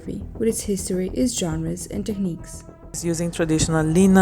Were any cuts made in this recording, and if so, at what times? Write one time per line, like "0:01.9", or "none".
0:03.0